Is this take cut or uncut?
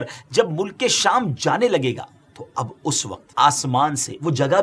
cut